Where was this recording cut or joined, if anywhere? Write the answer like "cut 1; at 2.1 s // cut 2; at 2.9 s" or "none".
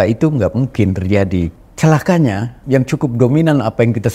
cut 1; at 1.5 s // cut 2; at 2.5 s